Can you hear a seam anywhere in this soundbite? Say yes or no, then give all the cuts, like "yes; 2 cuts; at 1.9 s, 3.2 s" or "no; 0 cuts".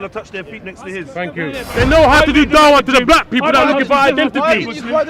yes; 1 cut; at 1.6 s